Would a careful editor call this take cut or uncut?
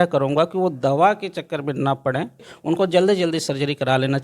cut